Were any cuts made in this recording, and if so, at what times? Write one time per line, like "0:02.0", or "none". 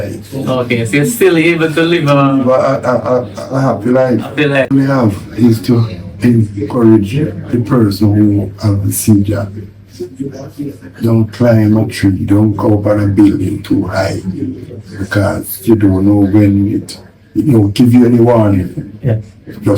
0:04.7

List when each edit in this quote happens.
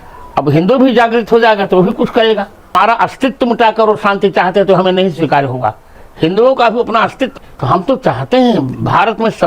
0:02.7
0:07.3

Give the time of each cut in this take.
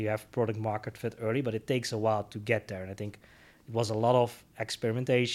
none

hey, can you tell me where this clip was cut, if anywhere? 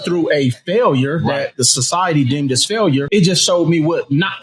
0:03.1

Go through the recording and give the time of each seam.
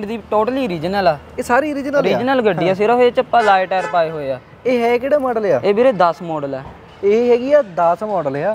none

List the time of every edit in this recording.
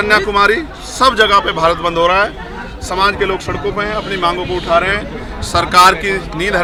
none

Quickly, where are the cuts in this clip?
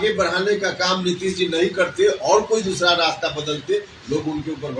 none

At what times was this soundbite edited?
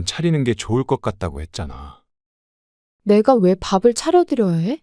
0:02.5

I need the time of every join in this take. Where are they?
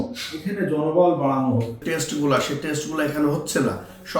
0:01.8

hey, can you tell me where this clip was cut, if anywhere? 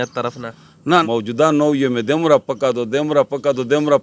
0:01.0

